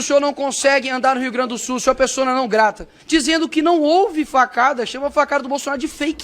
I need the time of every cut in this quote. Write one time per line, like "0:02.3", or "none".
0:02.9